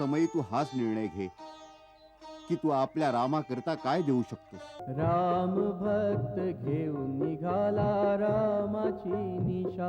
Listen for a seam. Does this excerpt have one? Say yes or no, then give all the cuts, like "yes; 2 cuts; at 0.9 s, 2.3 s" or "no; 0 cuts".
yes; 1 cut; at 4.8 s